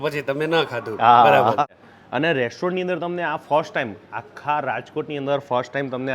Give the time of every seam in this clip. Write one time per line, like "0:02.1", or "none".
0:01.8